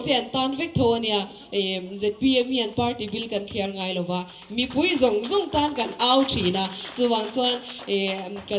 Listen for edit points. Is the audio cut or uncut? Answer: uncut